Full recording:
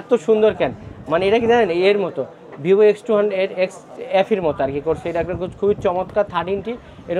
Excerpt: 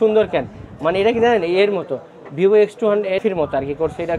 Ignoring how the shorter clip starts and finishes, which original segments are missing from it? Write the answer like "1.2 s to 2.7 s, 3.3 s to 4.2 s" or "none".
3.5 s to 4.3 s